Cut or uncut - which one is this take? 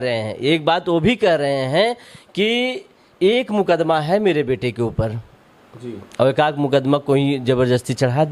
uncut